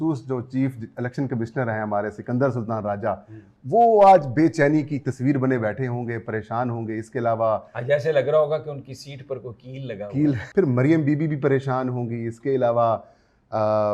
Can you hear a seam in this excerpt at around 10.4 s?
yes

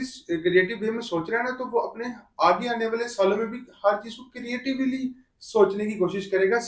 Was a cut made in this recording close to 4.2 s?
no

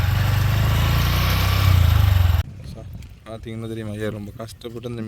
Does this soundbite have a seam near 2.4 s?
yes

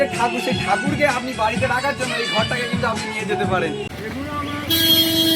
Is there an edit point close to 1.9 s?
no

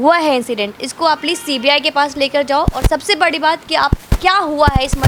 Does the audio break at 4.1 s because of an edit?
no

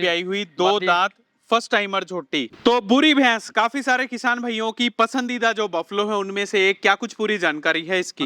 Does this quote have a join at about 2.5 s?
yes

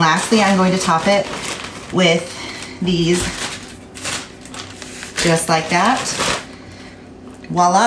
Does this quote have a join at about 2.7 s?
no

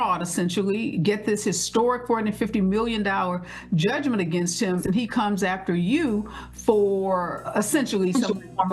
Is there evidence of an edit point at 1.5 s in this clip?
no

